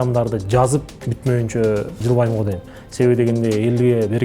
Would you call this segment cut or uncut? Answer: cut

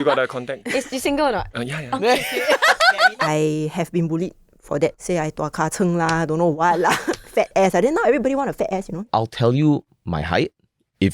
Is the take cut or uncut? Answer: cut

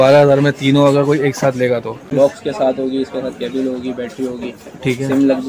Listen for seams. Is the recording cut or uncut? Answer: cut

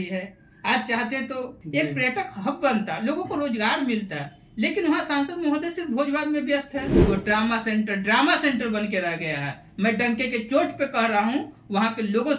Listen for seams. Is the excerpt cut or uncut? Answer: cut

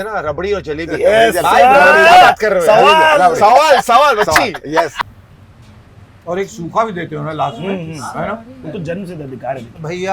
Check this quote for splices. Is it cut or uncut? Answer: cut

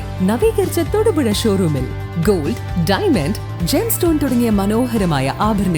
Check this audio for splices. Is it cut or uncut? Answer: uncut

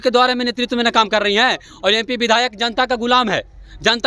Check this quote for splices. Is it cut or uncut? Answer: uncut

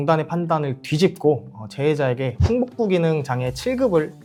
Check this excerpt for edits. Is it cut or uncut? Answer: uncut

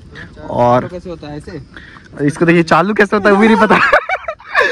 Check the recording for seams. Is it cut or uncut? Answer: uncut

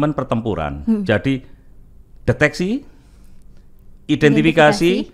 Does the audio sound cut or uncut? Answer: uncut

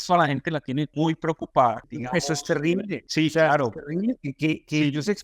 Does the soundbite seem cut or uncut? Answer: cut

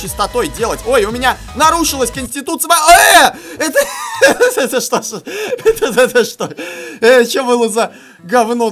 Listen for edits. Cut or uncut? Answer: uncut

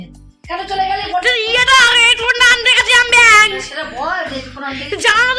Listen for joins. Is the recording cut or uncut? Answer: uncut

